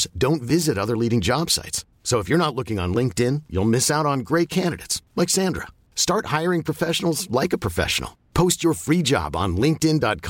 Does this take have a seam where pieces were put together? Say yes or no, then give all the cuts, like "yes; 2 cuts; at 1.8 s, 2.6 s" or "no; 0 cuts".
no; 0 cuts